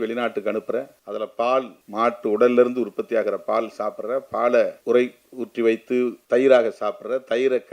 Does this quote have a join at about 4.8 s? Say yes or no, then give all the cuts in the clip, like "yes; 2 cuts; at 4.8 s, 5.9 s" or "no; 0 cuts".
yes; 4 cuts; at 1.0 s, 1.8 s, 4.8 s, 6.2 s